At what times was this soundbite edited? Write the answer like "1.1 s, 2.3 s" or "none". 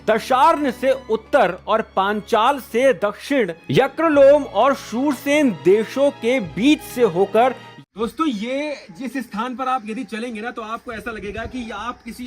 7.7 s